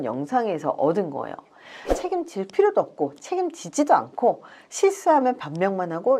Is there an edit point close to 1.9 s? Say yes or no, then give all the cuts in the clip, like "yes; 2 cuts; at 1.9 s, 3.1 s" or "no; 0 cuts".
yes; 1 cut; at 1.9 s